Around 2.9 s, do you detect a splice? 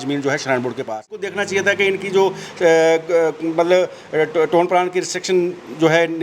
no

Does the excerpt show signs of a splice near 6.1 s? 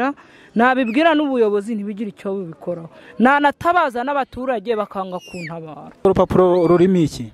yes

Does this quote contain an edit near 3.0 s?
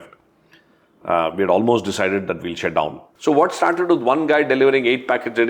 yes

